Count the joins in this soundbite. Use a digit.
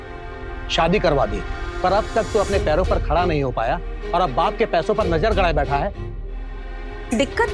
0